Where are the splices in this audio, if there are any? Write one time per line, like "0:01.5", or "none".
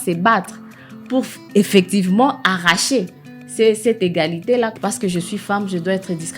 0:04.7

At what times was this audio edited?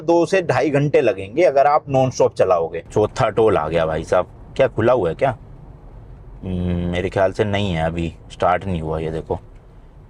0:02.8

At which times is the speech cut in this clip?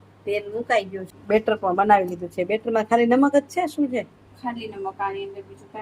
0:01.1

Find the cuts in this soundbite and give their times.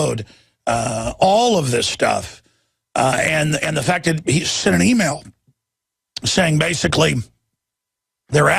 0:04.7

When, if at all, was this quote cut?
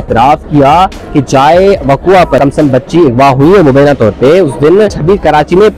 0:02.4
0:05.0

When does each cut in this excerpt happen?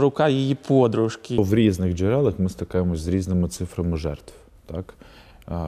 0:01.4

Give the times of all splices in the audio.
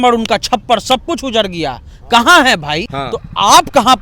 0:02.8

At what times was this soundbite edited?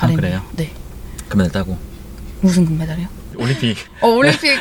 none

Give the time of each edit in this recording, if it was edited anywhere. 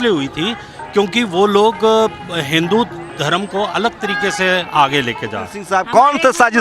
0:05.6

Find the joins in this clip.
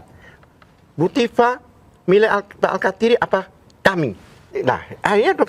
0:04.5

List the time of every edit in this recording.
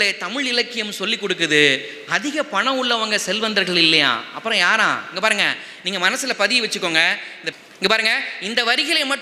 none

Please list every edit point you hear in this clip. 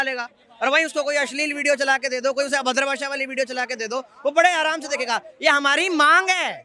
none

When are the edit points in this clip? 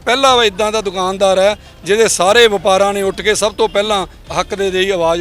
0:04.2

